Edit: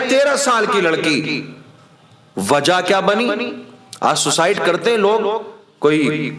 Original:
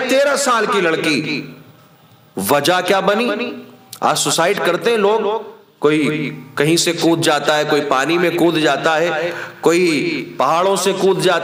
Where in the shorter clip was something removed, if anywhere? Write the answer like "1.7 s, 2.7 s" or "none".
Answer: none